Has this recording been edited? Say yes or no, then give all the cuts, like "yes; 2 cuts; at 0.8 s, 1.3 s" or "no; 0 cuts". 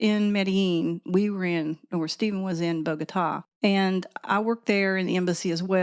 yes; 1 cut; at 3.4 s